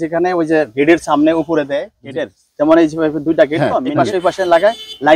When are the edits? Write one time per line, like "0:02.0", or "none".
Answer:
0:01.9
0:03.8